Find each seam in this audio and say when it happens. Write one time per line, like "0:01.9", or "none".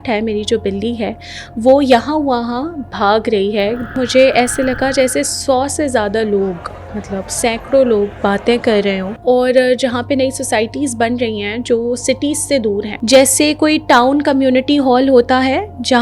0:04.0
0:09.1
0:12.9